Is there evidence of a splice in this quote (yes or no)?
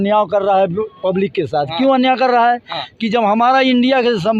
no